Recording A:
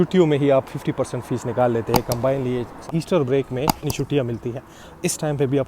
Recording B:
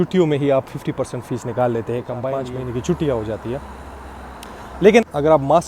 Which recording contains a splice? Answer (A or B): A